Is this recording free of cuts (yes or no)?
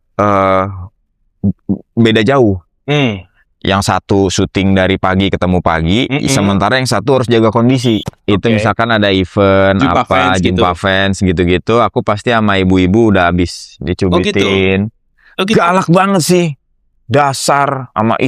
no